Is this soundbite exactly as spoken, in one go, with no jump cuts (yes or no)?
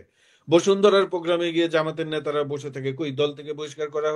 yes